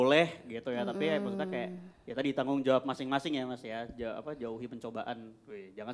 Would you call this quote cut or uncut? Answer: uncut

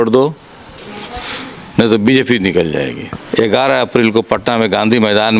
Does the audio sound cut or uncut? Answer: cut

